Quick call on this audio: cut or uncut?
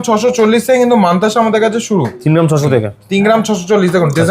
uncut